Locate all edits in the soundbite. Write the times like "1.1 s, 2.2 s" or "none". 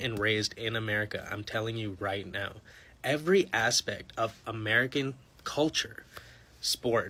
none